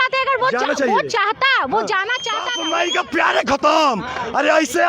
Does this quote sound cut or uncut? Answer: cut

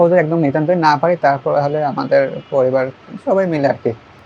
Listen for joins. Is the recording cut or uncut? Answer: uncut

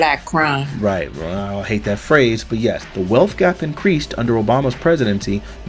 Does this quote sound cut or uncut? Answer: cut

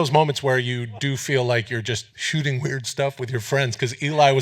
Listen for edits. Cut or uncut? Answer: cut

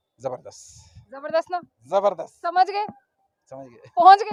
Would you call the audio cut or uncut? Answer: uncut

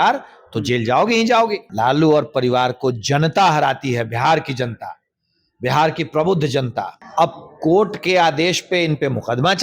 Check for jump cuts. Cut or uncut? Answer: cut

